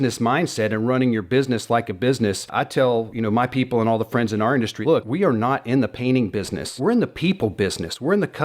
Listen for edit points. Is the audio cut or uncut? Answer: cut